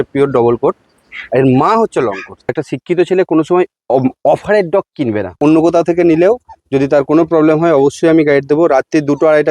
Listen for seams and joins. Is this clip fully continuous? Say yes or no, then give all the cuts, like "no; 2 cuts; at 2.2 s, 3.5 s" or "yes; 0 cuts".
no; 2 cuts; at 2.5 s, 5.3 s